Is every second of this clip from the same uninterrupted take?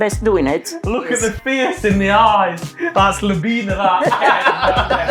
no; 1 cut; at 1.0 s

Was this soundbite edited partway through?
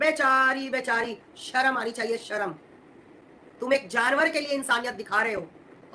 no; 0 cuts

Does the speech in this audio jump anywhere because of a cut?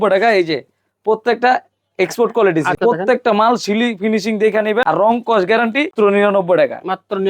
yes; 3 cuts; at 2.8 s, 4.8 s, 5.9 s

